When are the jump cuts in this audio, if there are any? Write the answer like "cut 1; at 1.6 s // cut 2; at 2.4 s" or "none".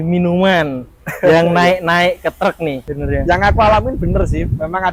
cut 1; at 2.9 s